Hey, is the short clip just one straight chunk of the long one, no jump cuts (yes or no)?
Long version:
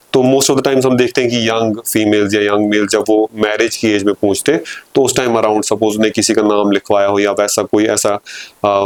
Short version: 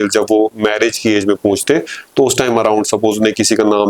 yes